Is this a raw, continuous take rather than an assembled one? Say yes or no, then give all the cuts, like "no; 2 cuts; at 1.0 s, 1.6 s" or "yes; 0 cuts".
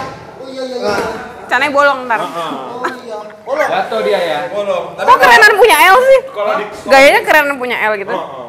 yes; 0 cuts